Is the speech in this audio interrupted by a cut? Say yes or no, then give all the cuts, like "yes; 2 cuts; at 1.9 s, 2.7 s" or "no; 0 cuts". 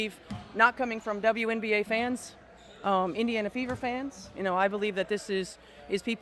no; 0 cuts